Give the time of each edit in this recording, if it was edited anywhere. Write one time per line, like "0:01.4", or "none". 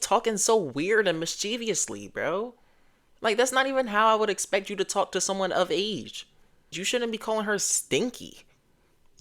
0:06.8